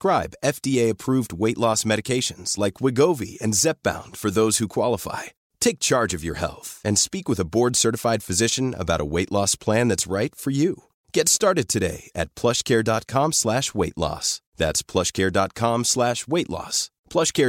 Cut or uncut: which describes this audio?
uncut